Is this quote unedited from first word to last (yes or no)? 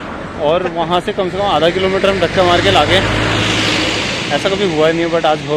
yes